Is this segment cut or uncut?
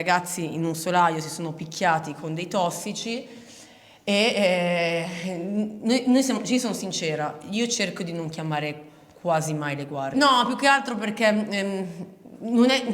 uncut